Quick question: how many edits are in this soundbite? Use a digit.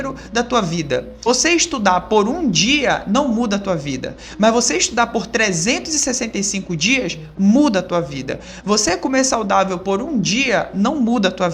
1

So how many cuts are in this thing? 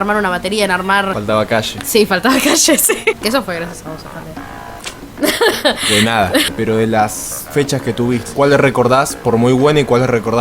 3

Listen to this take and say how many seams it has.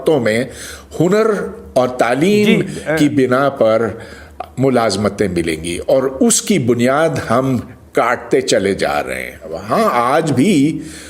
1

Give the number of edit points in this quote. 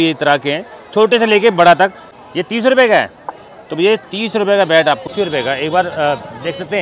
2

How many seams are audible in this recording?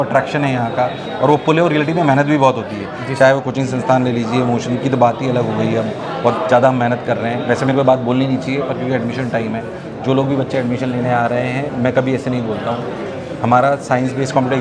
0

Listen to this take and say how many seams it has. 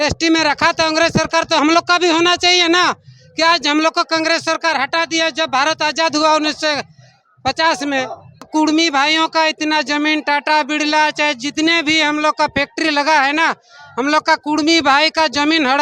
1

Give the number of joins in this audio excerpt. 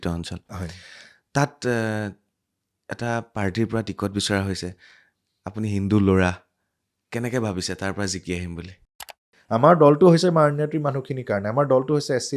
1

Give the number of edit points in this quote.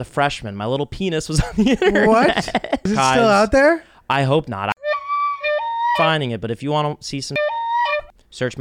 1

